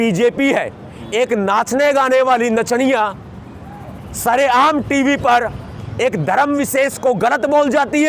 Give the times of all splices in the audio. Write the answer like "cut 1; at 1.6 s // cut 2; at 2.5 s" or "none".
none

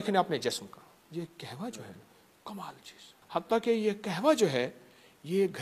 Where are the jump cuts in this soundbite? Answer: cut 1; at 1.0 s // cut 2; at 3.1 s

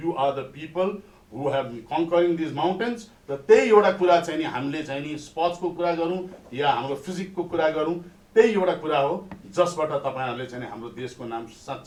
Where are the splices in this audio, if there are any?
none

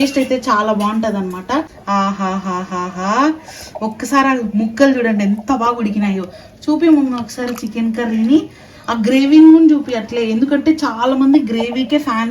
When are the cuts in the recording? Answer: cut 1; at 1.8 s

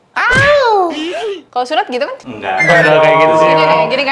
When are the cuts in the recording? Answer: none

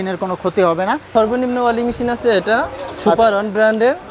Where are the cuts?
cut 1; at 1.1 s

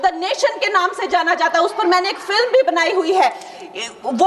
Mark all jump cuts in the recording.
none

